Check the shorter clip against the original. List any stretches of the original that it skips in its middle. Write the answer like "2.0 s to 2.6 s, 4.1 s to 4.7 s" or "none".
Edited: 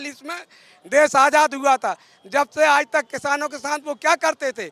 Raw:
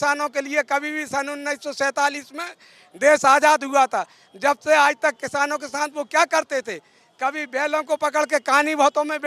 none

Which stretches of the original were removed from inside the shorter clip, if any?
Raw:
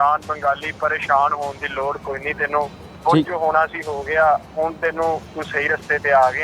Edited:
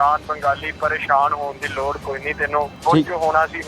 2.7 s to 2.9 s

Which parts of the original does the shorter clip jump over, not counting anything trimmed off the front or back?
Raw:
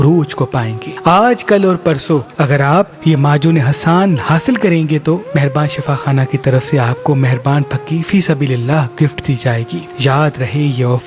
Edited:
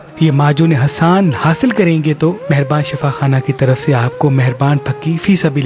none

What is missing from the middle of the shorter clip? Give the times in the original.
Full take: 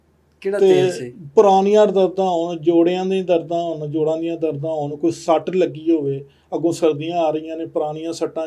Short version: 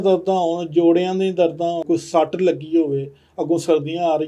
3.7 s to 4.9 s

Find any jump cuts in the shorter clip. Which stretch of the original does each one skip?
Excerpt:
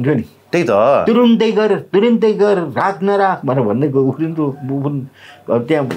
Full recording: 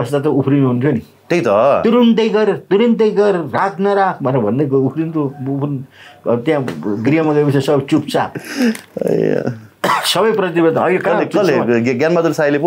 none

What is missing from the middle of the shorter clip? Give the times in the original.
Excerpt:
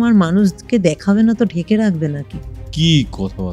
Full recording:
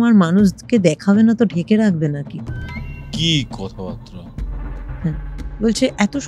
2.6 s to 3.0 s

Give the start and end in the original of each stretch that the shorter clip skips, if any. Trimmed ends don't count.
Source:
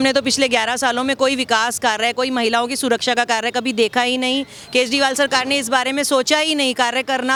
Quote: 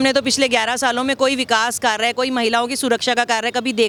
none

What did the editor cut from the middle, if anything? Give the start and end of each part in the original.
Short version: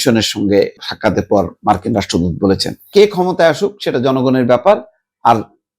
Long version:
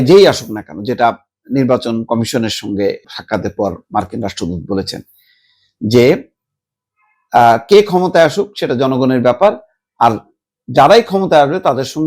5.1 s to 7.6 s

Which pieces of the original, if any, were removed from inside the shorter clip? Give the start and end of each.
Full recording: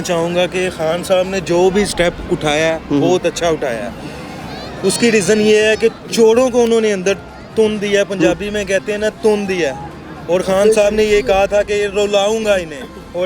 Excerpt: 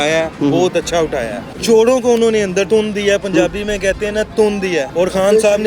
4.0 s to 6.0 s, 7.2 s to 7.5 s, 9.8 s to 10.2 s

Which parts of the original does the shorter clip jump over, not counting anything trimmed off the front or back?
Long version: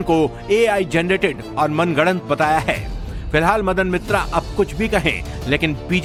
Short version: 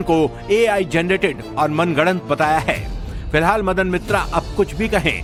none

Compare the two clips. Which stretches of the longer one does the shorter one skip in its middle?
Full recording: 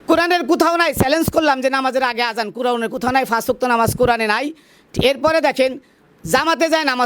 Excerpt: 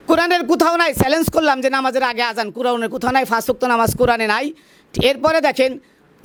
none

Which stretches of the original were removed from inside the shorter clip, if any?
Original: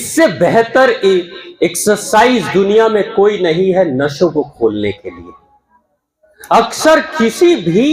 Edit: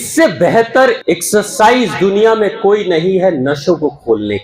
1.0 s to 1.5 s

